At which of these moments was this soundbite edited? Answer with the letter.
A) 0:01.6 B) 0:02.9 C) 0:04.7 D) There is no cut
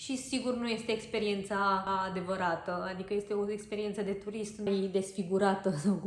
C